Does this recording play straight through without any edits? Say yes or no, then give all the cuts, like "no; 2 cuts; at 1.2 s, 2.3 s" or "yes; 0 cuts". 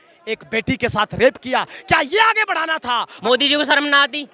no; 1 cut; at 3.1 s